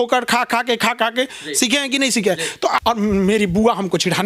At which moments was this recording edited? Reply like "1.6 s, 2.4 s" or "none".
2.8 s